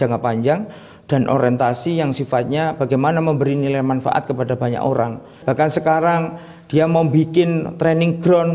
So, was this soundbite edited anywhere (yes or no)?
yes